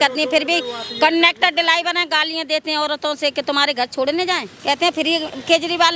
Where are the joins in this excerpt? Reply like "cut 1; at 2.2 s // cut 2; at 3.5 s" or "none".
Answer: cut 1; at 4.5 s